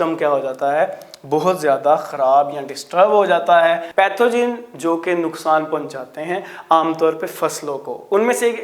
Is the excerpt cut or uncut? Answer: cut